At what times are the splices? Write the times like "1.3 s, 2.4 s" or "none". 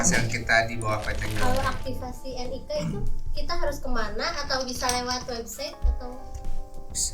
1.2 s